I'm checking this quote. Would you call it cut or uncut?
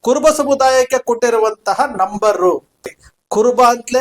cut